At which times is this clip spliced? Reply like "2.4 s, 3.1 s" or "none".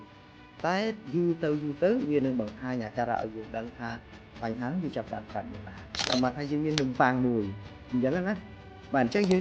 6.1 s